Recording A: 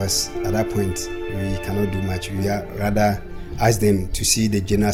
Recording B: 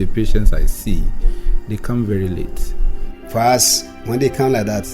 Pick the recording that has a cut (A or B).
B